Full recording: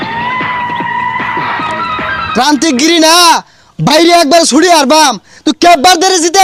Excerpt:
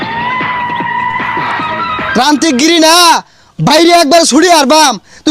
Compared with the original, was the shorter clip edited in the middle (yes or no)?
yes